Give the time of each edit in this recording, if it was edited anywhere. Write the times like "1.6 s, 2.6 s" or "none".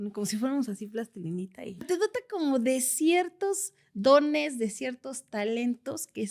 1.9 s